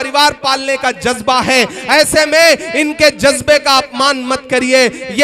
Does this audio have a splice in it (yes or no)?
no